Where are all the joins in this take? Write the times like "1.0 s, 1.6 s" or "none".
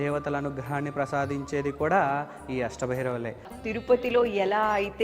3.5 s